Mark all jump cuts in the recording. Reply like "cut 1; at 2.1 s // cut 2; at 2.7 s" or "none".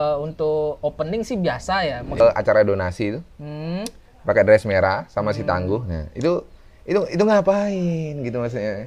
cut 1; at 2.2 s